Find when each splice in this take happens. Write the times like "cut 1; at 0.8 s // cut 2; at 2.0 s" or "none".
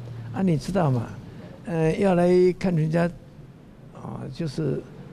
none

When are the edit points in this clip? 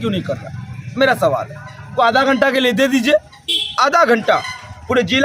cut 1; at 1.9 s

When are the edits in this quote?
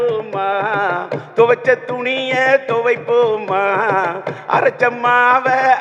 none

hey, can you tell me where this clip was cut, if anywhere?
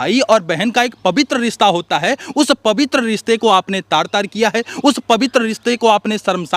none

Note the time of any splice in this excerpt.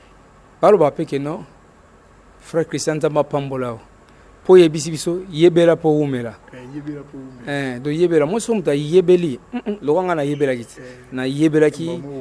none

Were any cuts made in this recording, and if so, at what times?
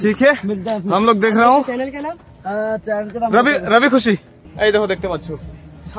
cut 1; at 4.4 s

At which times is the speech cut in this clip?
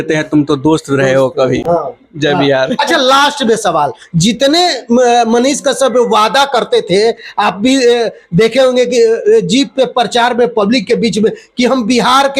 none

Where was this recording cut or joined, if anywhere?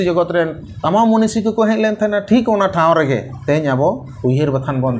cut 1; at 3.3 s // cut 2; at 4.1 s

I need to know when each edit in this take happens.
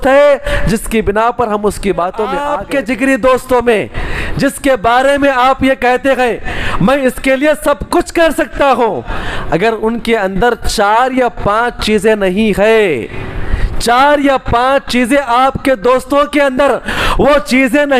cut 1; at 2.6 s

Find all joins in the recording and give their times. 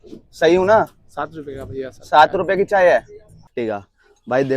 cut 1; at 3.5 s

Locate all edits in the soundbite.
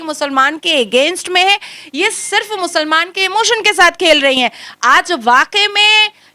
none

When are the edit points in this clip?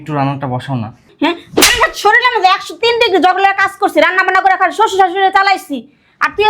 cut 1; at 1.1 s

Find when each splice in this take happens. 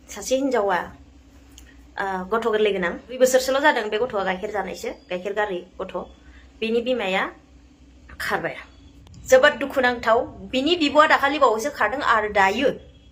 none

